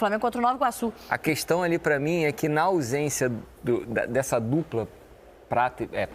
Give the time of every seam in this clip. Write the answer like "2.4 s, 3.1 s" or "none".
1.0 s